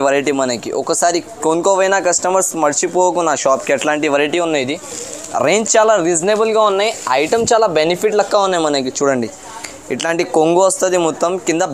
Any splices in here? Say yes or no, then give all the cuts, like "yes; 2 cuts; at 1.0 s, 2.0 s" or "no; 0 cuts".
no; 0 cuts